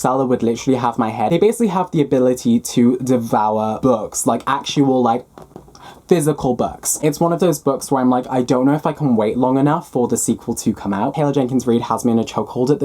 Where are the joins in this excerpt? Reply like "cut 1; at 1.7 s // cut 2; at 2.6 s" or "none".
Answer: cut 1; at 1.3 s // cut 2; at 7.0 s // cut 3; at 11.1 s